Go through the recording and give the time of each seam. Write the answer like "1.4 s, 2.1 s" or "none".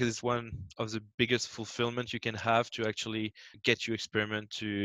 3.6 s